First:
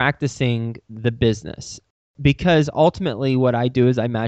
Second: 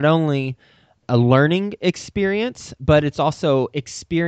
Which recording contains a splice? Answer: second; 1 cut; at 1.0 s

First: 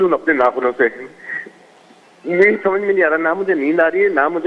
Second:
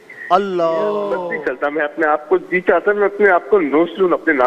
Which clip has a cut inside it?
second; 1 cut; at 1.3 s

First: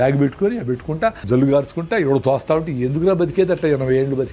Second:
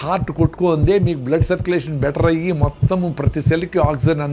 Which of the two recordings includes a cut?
first; 1 cut; at 1.2 s

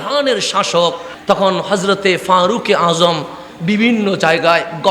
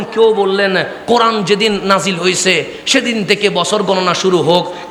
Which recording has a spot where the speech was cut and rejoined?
first; 1 cut; at 1.1 s

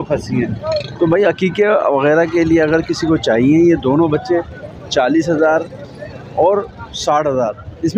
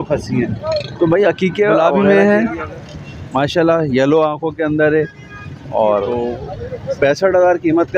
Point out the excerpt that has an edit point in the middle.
second; 2 cuts; at 1.8 s, 6.2 s

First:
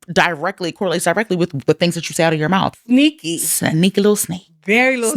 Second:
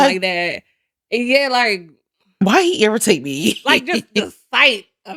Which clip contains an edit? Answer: first; 1 cut; at 2.8 s

